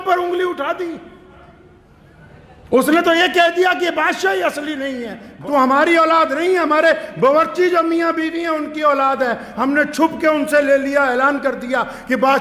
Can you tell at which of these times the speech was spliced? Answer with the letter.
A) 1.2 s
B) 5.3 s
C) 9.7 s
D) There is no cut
B